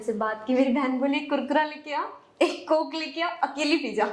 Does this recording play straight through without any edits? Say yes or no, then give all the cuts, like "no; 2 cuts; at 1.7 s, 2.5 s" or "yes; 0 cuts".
yes; 0 cuts